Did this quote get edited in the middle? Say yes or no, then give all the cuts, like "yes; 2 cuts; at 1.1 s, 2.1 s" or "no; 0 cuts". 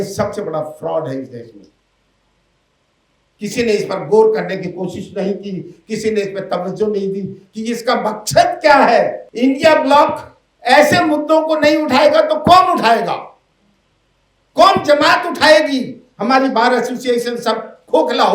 yes; 1 cut; at 9.2 s